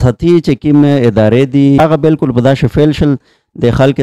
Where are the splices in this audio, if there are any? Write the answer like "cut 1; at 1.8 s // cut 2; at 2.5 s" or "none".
cut 1; at 1.8 s